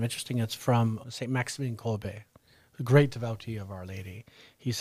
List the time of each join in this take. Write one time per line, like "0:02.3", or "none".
0:01.1